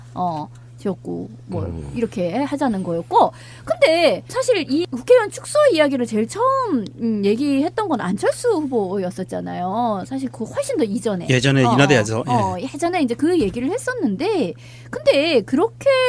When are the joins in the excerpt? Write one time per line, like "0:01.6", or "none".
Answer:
none